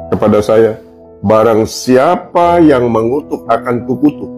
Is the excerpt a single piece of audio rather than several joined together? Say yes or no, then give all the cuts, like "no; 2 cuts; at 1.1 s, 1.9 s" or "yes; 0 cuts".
yes; 0 cuts